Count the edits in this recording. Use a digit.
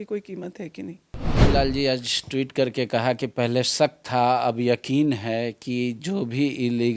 1